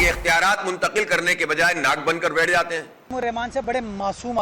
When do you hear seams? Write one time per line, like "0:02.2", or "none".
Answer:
0:02.9